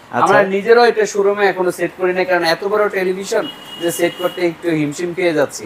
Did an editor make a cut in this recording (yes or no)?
no